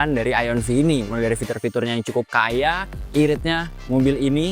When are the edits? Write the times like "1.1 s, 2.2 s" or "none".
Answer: 2.9 s